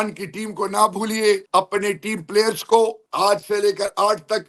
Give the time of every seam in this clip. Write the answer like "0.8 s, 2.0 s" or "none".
1.4 s, 3.0 s